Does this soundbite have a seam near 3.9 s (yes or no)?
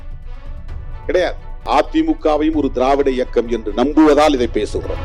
no